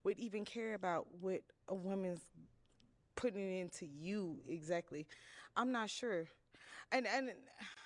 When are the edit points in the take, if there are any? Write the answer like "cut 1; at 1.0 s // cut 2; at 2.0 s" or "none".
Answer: cut 1; at 4.5 s